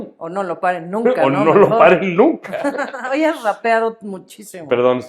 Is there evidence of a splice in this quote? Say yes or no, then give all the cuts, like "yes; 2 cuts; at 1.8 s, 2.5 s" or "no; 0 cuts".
no; 0 cuts